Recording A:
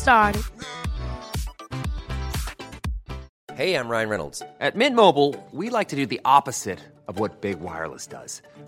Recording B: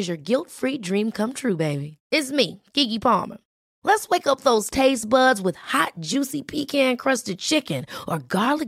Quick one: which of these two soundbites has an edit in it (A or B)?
A